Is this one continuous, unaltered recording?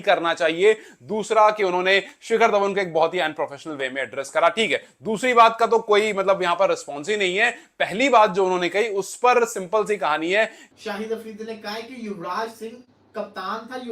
no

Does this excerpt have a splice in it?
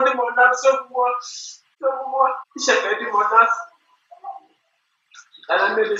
yes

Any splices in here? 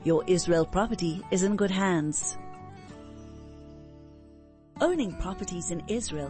yes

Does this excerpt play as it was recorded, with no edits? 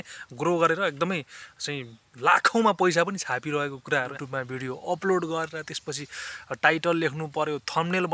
no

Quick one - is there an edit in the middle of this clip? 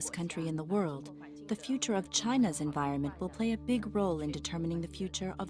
yes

